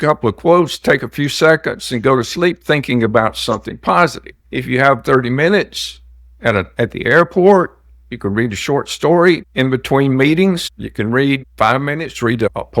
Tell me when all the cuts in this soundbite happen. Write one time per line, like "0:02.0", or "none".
none